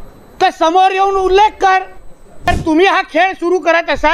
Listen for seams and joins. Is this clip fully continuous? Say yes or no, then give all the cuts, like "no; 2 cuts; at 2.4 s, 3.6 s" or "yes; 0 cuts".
no; 1 cut; at 2.5 s